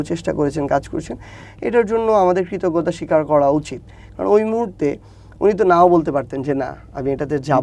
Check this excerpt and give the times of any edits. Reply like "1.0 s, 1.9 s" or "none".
none